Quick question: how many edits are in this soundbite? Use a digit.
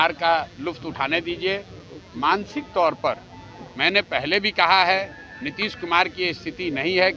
0